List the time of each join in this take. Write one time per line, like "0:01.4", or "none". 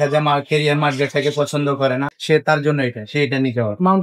0:02.2